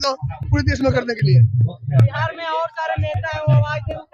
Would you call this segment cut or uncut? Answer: uncut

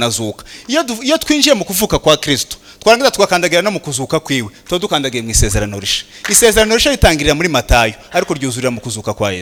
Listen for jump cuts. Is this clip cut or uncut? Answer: uncut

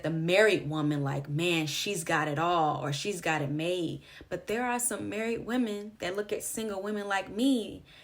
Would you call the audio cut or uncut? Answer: uncut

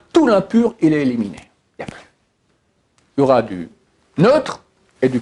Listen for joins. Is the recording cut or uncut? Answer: uncut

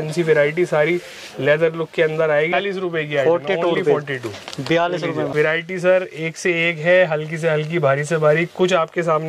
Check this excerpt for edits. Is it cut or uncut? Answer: cut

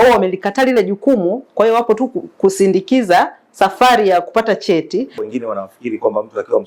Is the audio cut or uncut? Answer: cut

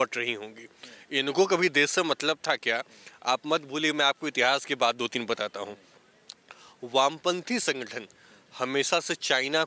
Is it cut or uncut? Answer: uncut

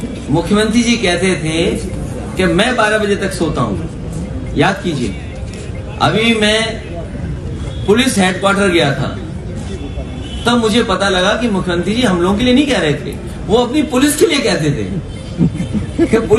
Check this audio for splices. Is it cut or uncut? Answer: uncut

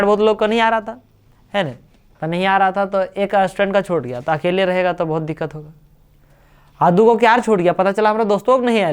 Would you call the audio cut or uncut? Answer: uncut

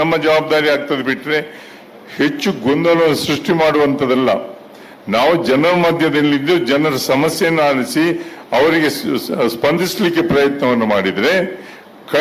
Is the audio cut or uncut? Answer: uncut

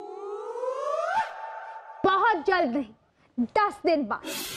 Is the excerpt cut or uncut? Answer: uncut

